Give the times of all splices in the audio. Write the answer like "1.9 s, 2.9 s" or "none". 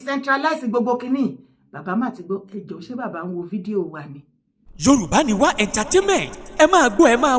4.7 s